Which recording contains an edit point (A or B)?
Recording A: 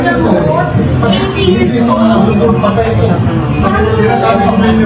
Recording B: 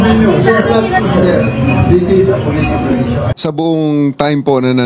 B